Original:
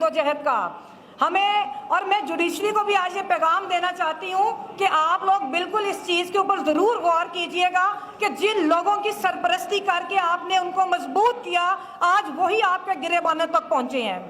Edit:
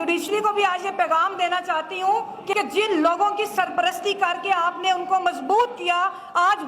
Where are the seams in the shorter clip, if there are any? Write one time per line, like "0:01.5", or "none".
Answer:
0:02.5